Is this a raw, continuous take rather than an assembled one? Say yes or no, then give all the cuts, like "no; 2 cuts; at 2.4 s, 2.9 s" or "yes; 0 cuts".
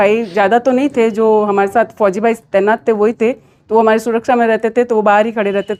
yes; 0 cuts